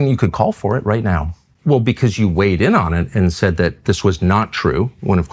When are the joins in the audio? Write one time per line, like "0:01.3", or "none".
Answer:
0:01.5